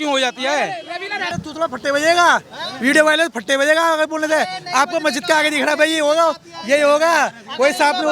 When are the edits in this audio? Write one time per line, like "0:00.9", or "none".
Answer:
0:01.4